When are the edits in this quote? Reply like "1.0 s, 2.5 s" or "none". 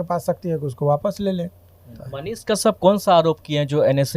2.2 s